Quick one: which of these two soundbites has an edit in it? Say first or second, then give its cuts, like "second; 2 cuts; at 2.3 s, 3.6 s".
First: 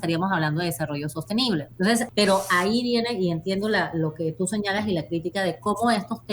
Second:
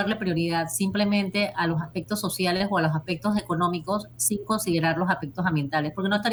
first; 1 cut; at 2.0 s